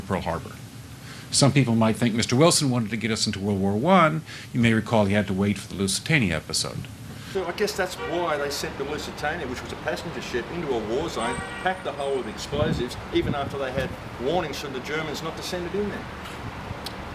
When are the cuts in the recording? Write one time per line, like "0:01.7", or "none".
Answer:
none